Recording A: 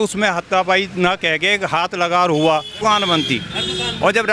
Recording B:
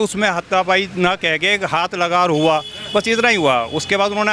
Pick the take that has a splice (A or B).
A